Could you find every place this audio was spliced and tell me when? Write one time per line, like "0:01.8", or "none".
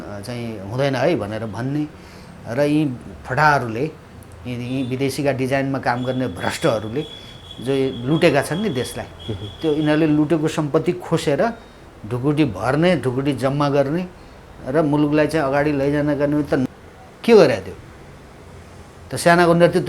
0:16.7

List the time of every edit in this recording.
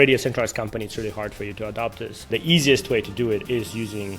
0:02.3

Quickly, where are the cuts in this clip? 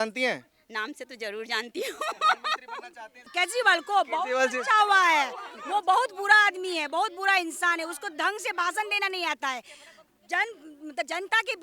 0:03.2

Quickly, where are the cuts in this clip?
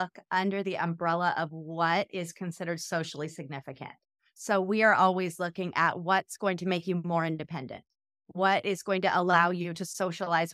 none

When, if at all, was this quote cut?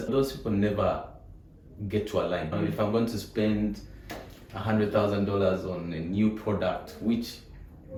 none

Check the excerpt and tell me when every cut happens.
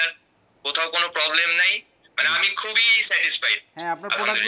none

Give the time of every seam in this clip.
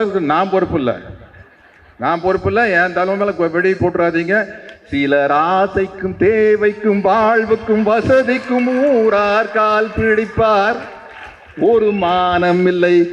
none

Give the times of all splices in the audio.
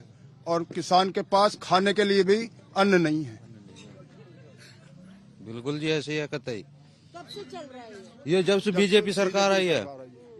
none

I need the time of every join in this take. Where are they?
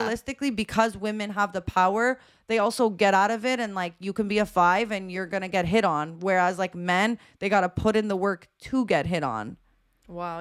none

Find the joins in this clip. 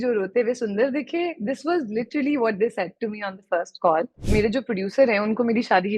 0:04.2

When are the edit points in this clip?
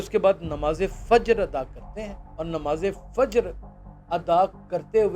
0:02.2

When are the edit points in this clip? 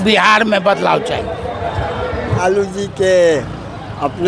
0:02.4

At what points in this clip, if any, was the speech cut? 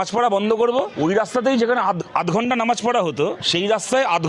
0:00.9
0:03.4

